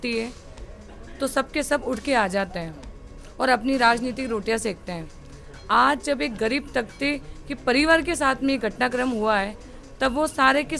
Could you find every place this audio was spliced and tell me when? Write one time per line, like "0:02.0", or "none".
none